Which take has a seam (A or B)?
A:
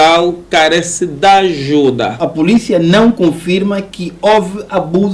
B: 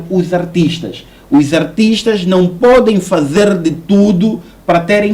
A